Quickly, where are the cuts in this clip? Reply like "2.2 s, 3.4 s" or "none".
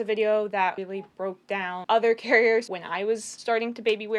1.2 s, 2.7 s